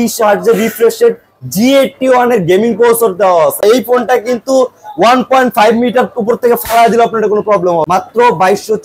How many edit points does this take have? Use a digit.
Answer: 2